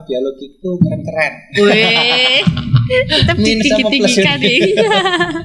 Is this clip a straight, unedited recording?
yes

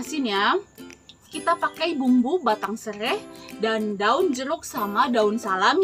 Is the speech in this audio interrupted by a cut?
yes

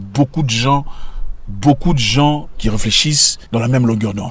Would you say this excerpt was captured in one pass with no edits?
no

